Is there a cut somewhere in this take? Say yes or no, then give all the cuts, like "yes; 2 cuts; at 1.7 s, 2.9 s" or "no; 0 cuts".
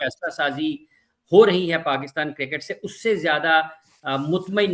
no; 0 cuts